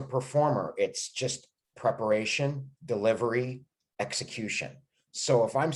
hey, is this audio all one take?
yes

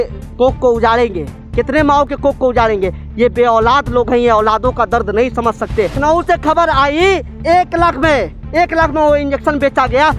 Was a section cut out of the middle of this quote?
yes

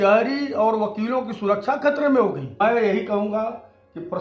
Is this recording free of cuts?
no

